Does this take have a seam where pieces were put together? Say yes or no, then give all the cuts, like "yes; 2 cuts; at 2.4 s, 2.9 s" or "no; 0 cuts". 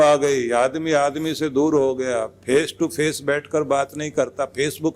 no; 0 cuts